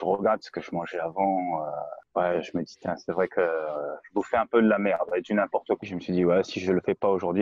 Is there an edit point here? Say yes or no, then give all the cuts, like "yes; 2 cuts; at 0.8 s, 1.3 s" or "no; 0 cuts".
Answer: yes; 1 cut; at 5.8 s